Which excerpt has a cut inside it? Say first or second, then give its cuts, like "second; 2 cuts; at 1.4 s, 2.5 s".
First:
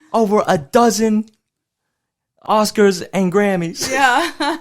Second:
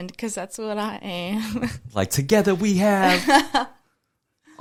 first; 1 cut; at 2.4 s